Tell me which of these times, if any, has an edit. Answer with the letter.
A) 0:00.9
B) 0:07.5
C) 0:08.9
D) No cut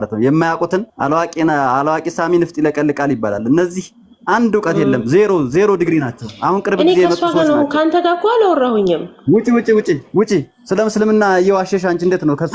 A